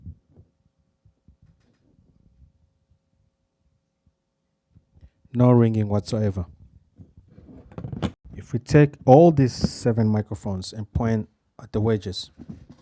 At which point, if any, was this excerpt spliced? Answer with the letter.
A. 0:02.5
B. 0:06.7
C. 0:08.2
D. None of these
C